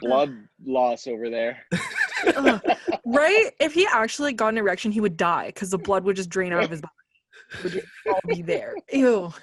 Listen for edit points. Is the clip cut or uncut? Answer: uncut